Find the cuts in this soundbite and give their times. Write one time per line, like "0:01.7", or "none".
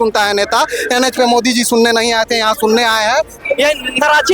0:03.3